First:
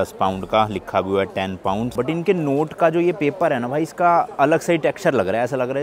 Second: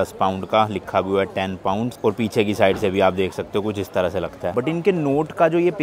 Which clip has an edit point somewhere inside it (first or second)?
first